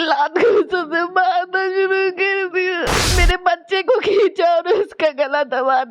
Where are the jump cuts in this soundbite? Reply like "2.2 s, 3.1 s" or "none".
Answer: 3.1 s